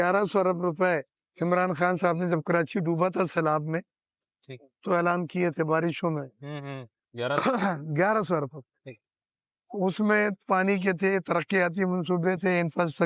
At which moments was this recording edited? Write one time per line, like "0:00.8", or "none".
none